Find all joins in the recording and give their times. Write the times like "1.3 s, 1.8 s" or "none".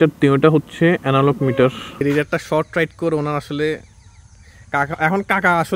2.0 s